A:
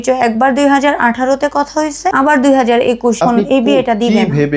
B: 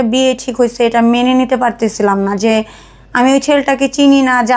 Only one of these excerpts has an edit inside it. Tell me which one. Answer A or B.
A